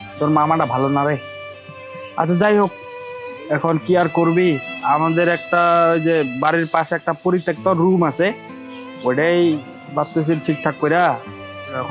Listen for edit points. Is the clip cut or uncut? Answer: uncut